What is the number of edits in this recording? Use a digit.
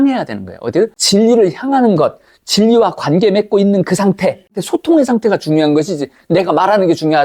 2